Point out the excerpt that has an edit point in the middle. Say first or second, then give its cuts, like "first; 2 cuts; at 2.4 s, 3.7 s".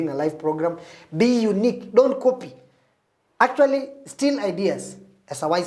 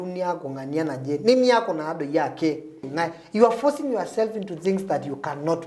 second; 1 cut; at 2.8 s